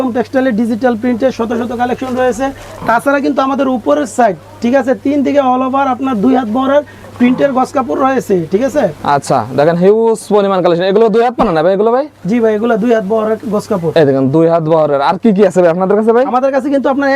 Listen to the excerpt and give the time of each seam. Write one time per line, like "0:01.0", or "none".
none

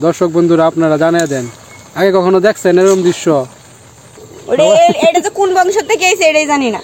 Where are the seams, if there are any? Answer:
0:04.3

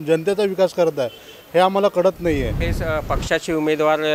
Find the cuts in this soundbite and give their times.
0:02.7

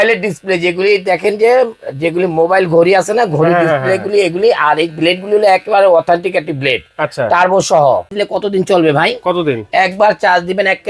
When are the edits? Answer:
0:08.1

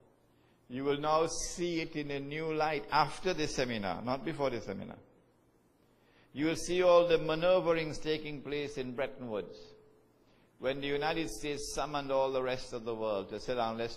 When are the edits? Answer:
none

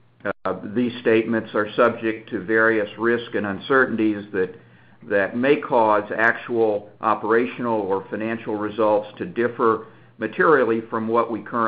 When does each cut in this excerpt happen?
none

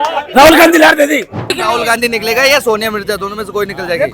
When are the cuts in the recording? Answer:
0:01.5

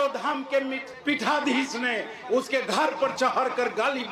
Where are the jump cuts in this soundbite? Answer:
none

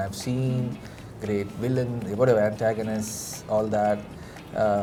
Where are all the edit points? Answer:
none

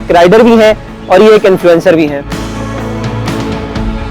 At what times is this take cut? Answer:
0:02.3

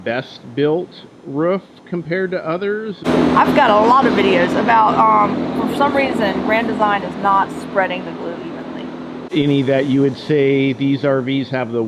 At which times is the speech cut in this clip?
0:02.9
0:09.2

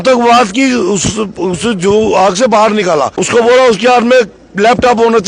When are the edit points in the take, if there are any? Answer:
0:03.2

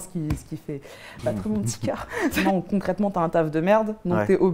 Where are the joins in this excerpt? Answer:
0:02.4

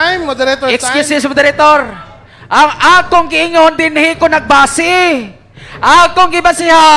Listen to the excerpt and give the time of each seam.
none

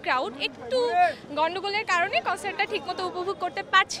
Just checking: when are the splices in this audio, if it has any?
none

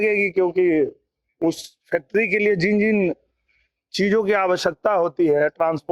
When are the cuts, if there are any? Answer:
none

